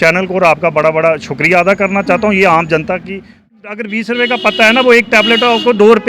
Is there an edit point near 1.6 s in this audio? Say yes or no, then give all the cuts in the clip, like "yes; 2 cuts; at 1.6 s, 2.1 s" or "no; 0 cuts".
no; 1 cut; at 3.5 s